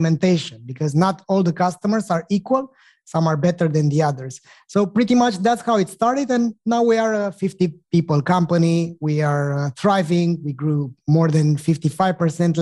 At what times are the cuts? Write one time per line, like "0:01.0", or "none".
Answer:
none